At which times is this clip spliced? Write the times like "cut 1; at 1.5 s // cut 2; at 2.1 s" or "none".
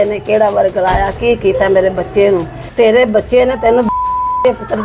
cut 1; at 2.6 s